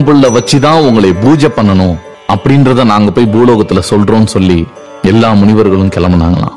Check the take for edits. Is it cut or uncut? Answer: uncut